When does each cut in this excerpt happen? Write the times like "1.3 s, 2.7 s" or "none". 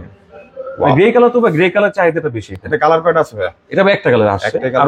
none

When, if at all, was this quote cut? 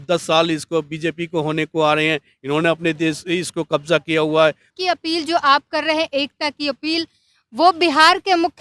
4.7 s

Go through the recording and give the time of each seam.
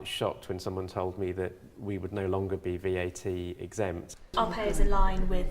4.3 s

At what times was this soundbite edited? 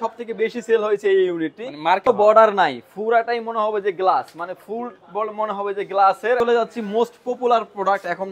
2.0 s, 6.4 s

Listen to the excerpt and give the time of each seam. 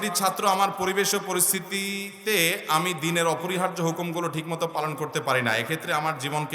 none

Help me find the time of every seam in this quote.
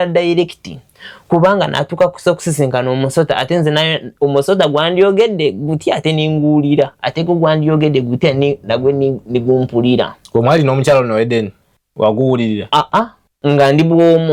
none

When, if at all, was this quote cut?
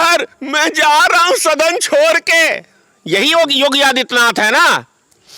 none

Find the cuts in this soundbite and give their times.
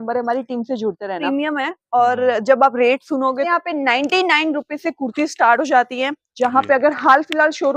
1.2 s, 3.5 s

